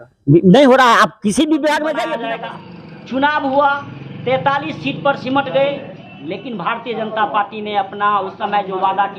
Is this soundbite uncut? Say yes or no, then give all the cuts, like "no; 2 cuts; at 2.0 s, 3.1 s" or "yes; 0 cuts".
no; 1 cut; at 2.2 s